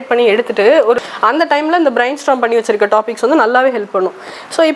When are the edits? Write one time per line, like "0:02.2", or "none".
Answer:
0:01.0